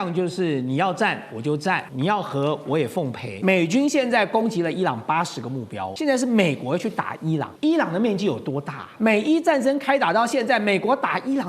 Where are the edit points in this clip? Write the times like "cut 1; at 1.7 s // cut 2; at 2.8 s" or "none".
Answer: cut 1; at 1.9 s // cut 2; at 3.2 s // cut 3; at 5.8 s // cut 4; at 7.5 s // cut 5; at 8.8 s